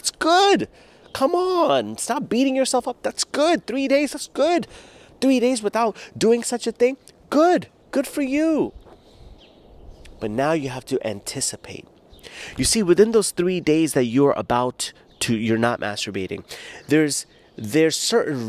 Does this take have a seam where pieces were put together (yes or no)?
no